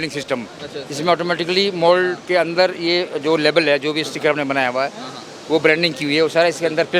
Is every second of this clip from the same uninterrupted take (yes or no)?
yes